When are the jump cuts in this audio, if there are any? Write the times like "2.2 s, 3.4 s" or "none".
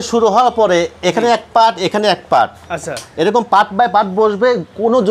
none